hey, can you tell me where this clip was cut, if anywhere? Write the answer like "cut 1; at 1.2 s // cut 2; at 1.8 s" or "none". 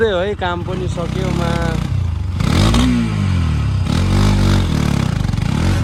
none